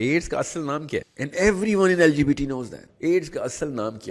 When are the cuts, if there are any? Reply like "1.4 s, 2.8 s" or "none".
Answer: 1.2 s, 2.8 s

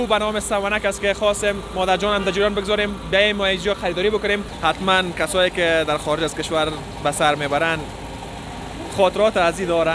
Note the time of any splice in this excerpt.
4.5 s

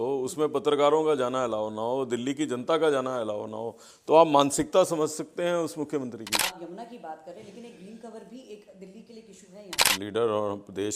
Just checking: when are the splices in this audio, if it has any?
6.4 s, 9.9 s

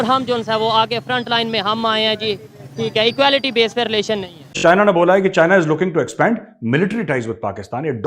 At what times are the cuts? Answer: 4.4 s

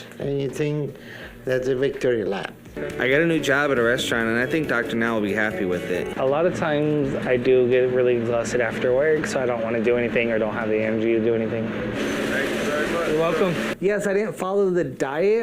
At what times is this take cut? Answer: 2.8 s, 6.1 s, 13.7 s

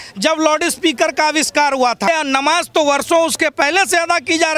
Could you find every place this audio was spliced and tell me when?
2.1 s

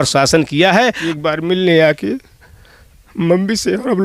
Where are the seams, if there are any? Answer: 1.1 s

